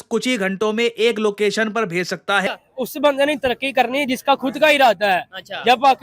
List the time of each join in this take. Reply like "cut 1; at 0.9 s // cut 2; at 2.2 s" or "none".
cut 1; at 2.5 s